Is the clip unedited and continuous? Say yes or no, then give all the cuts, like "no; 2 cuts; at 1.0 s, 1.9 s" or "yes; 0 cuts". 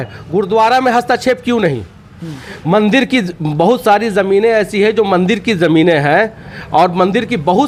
yes; 0 cuts